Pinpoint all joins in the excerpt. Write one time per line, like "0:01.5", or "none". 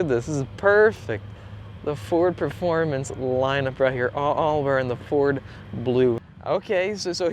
0:06.3